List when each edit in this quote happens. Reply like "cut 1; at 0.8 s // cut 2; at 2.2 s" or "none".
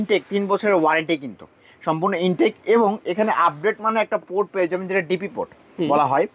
none